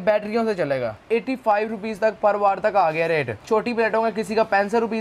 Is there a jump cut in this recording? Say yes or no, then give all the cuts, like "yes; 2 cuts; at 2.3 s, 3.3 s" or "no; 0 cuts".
yes; 2 cuts; at 1.0 s, 3.3 s